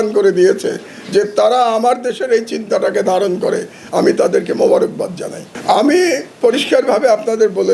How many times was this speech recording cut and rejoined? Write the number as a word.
zero